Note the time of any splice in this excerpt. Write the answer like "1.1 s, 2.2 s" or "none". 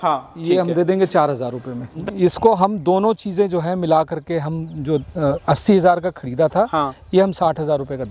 1.9 s